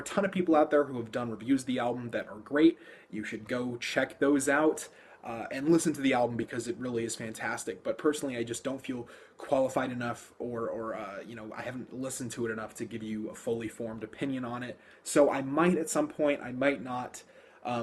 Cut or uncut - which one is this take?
cut